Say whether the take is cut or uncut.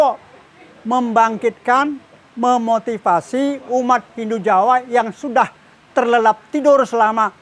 uncut